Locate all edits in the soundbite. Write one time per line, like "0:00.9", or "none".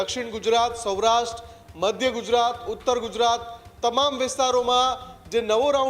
none